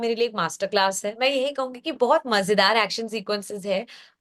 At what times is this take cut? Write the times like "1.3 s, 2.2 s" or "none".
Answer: 1.2 s